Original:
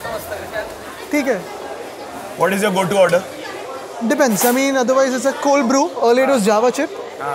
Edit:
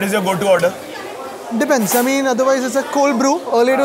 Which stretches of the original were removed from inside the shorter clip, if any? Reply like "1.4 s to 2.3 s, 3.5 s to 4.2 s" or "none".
none